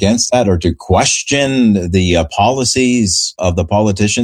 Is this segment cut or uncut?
cut